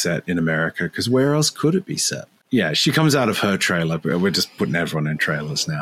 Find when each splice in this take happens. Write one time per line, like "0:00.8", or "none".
0:02.4